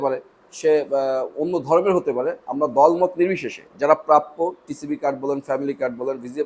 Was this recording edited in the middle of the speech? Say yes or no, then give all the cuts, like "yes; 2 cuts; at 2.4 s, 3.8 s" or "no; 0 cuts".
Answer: no; 0 cuts